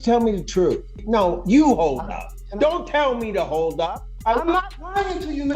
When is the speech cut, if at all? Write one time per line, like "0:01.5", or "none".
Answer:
0:01.0
0:04.1